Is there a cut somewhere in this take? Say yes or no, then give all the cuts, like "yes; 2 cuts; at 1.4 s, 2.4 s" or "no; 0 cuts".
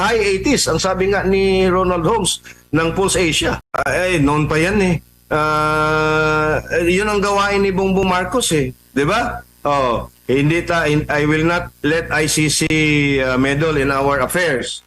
yes; 1 cut; at 3.6 s